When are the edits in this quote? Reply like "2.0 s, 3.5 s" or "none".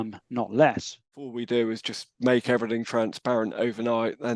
1.3 s